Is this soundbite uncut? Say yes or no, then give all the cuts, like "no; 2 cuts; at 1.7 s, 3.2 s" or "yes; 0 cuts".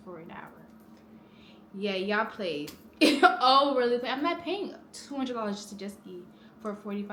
yes; 0 cuts